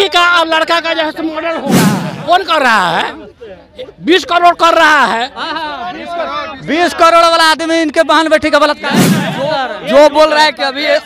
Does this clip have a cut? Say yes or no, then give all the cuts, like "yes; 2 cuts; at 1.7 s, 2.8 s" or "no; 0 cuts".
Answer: yes; 2 cuts; at 1.7 s, 9.2 s